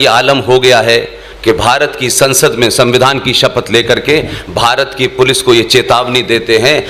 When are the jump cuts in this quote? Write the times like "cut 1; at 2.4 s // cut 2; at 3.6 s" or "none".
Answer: none